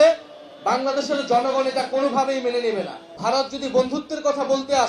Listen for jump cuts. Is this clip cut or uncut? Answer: cut